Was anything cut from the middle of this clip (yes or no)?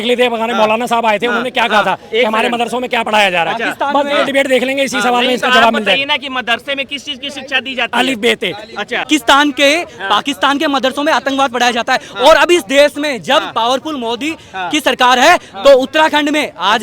yes